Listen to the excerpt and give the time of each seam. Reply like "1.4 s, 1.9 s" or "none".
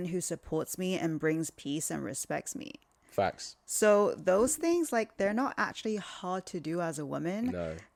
none